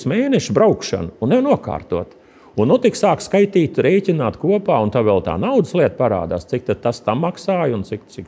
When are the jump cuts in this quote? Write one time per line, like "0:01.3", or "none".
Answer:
none